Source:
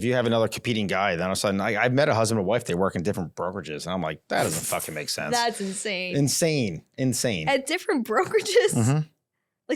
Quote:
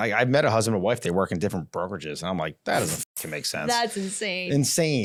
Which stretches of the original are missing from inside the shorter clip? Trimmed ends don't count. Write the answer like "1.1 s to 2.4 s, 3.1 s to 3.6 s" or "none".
none